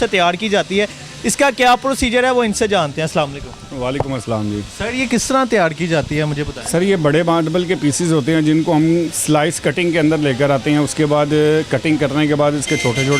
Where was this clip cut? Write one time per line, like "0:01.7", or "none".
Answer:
none